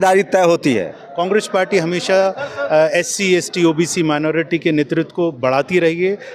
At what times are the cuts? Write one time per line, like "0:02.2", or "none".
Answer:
0:01.0